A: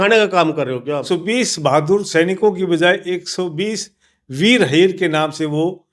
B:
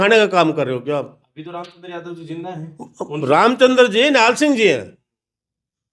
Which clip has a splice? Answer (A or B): A